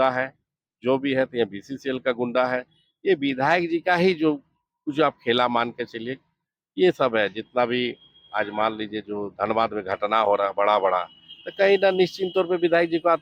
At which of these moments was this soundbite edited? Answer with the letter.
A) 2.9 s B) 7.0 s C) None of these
C